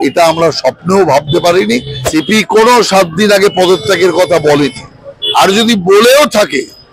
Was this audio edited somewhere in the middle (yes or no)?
yes